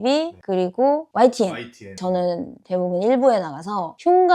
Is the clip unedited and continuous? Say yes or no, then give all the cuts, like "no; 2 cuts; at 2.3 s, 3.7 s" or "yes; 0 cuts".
no; 1 cut; at 2.0 s